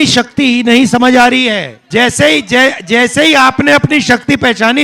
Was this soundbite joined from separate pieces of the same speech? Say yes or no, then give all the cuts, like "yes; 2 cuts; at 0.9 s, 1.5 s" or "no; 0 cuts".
yes; 1 cut; at 1.7 s